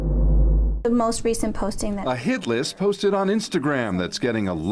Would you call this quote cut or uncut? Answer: uncut